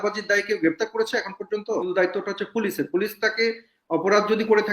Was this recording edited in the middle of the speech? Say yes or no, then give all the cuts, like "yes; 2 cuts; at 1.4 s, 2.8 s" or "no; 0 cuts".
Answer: yes; 1 cut; at 1.9 s